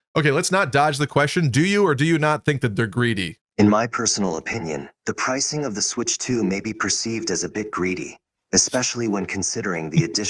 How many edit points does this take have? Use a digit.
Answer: 1